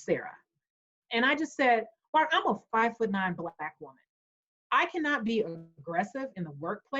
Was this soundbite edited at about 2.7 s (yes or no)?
no